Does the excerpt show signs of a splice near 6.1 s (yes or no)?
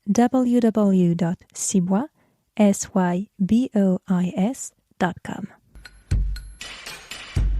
yes